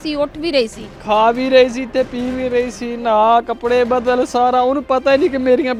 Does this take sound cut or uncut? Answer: uncut